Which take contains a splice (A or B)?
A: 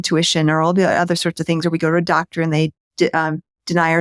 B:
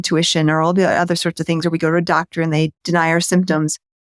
B